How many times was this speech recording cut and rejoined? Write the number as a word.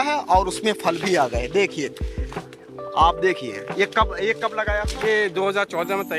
zero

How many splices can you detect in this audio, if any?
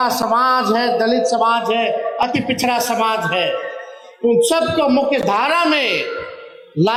zero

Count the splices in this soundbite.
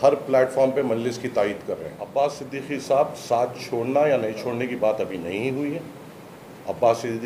one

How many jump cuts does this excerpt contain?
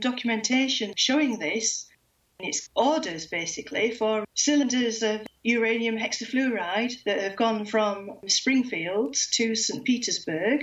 one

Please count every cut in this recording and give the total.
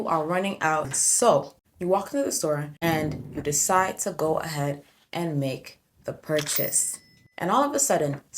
one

